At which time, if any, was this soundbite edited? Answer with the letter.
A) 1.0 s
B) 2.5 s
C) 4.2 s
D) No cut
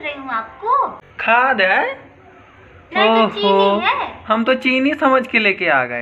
A